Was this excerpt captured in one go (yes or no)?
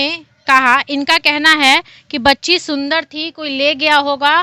yes